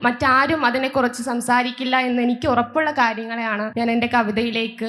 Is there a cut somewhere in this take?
no; 0 cuts

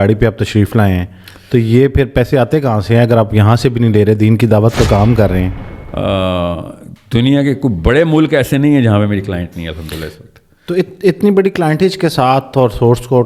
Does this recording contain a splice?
yes; 1 cut; at 5.6 s

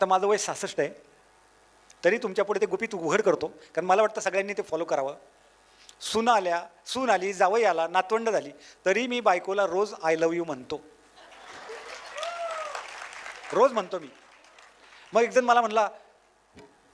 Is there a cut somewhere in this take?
no; 0 cuts

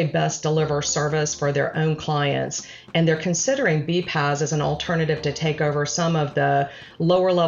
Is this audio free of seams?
yes; 0 cuts

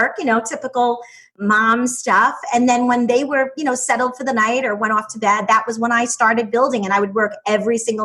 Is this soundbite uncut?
no; 1 cut; at 1.4 s

